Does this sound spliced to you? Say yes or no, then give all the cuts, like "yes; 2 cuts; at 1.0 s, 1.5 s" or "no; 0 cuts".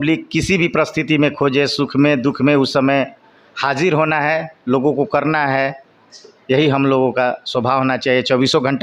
no; 0 cuts